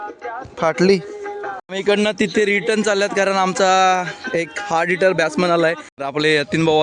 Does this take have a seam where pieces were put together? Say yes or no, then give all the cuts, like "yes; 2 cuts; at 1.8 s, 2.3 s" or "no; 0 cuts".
yes; 2 cuts; at 1.7 s, 5.9 s